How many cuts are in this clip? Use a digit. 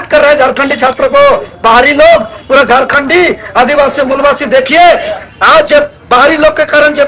0